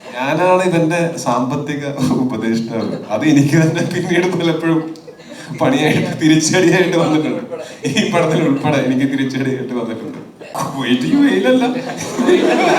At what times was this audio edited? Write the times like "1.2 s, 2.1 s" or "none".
10.5 s